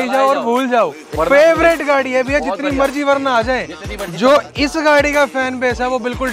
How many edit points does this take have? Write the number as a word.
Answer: one